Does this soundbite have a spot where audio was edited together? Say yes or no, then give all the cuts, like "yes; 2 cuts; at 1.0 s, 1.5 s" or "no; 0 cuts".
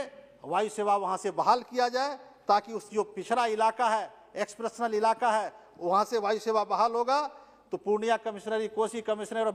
no; 0 cuts